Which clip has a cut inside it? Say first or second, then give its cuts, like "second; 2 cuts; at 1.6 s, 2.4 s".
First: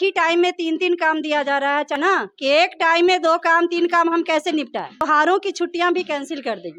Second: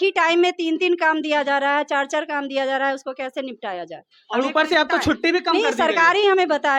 first; 2 cuts; at 2.0 s, 5.0 s